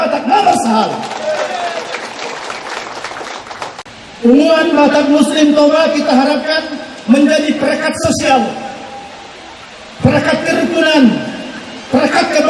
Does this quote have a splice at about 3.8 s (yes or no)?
yes